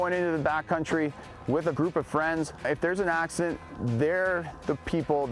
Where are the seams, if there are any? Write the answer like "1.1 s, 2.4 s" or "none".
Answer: 1.8 s, 2.6 s